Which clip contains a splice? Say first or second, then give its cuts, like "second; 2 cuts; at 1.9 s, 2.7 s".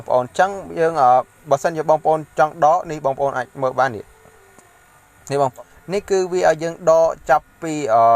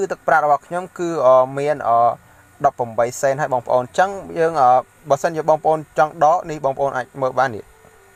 first; 1 cut; at 5.5 s